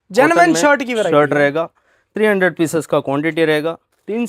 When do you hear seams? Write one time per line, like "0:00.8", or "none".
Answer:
none